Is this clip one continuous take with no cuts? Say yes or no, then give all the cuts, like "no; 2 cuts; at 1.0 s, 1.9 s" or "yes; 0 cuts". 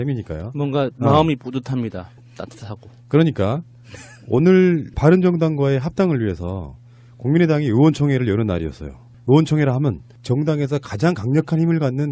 yes; 0 cuts